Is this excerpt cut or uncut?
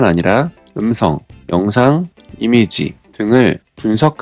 uncut